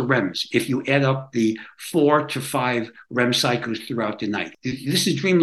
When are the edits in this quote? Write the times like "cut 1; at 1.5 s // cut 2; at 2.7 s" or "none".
cut 1; at 4.5 s